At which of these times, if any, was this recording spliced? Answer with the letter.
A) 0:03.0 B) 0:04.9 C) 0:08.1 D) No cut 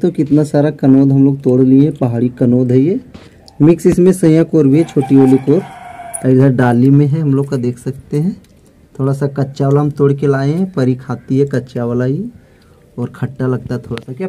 D